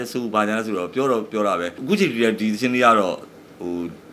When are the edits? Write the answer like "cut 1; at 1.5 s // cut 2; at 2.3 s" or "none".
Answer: cut 1; at 1.8 s